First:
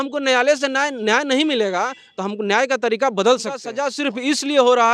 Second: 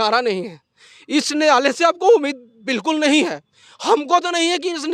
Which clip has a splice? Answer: first; 1 cut; at 3.7 s

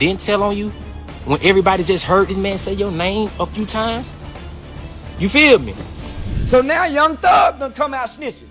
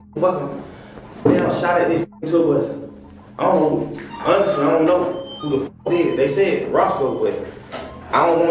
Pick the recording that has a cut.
first; 1 cut; at 6.0 s

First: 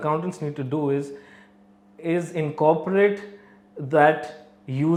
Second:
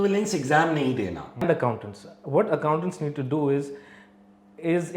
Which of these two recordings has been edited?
second; 1 cut; at 1.4 s

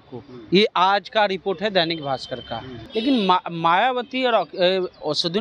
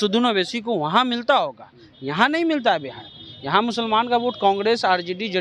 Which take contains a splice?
first; 1 cut; at 2.8 s

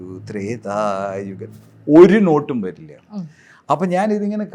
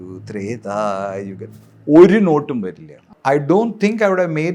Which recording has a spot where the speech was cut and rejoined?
second; 1 cut; at 3.1 s

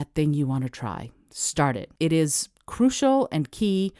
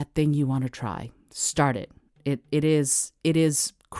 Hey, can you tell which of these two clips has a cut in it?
first; 1 cut; at 1.9 s

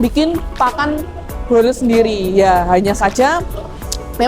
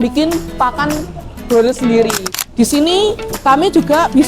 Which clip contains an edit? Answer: second; 1 cut; at 2.2 s

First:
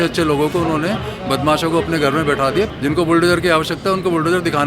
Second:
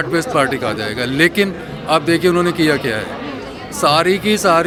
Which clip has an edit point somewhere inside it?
first; 1 cut; at 2.7 s

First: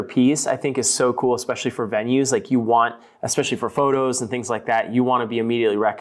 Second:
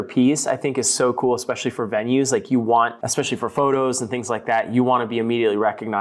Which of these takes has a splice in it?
second; 1 cut; at 3.0 s

